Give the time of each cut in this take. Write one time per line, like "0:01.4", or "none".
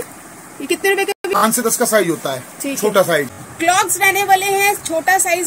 0:01.2
0:03.4